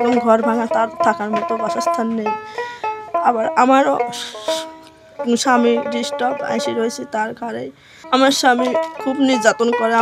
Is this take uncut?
no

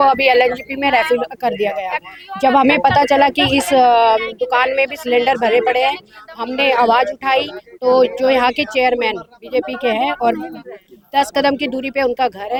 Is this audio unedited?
yes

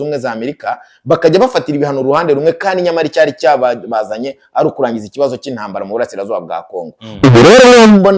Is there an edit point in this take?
no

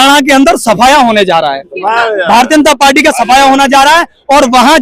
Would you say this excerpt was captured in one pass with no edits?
yes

